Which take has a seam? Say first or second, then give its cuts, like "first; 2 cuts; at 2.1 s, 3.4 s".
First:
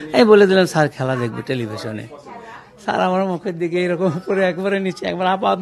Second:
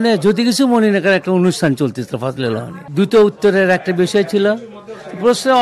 second; 1 cut; at 2.8 s